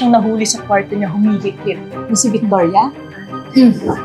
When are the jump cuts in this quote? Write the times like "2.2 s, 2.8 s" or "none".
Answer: 2.0 s